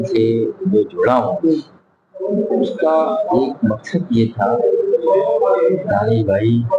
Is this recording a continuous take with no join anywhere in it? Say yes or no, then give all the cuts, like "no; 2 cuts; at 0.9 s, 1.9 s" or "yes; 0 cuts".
yes; 0 cuts